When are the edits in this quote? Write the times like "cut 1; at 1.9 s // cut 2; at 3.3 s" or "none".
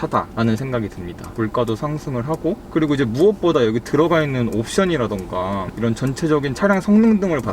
cut 1; at 1.3 s